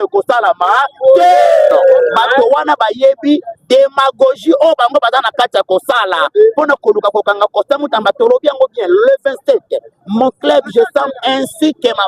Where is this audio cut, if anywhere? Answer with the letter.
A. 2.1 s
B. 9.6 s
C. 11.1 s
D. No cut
A